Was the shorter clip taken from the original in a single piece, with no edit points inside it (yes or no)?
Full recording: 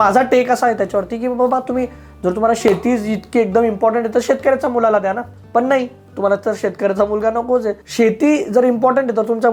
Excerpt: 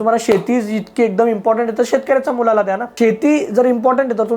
no